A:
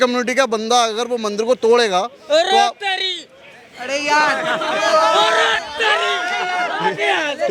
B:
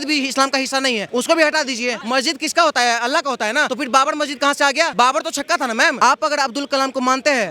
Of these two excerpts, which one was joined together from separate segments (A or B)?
B